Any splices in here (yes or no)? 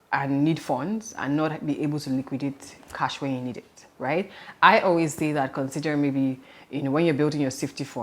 no